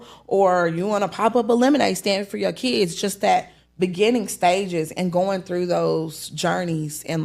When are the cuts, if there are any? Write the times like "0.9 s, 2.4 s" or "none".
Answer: none